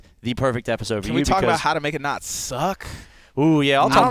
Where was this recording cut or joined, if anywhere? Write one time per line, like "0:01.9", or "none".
none